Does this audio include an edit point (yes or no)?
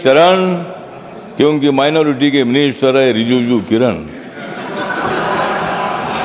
no